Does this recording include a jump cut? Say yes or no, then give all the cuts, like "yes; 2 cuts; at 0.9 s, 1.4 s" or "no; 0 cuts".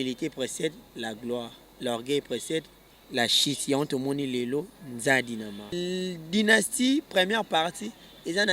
yes; 1 cut; at 5.7 s